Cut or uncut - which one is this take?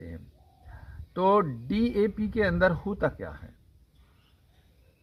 uncut